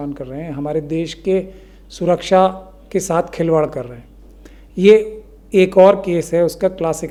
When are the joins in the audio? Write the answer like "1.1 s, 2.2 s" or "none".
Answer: none